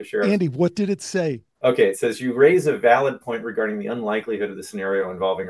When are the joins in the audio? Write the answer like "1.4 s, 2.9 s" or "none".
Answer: 1.5 s